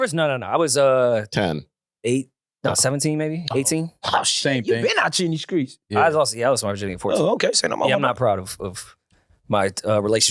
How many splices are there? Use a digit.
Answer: 0